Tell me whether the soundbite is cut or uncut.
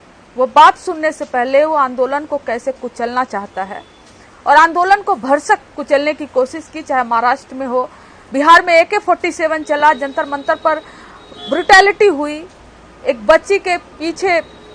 uncut